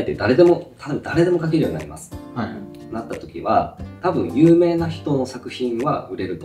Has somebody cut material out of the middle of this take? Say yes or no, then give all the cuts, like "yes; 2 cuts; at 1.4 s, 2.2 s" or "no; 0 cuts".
no; 0 cuts